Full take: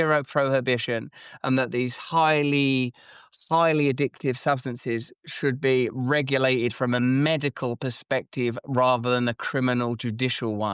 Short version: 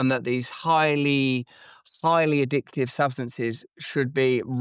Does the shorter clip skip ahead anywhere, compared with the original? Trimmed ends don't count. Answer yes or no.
no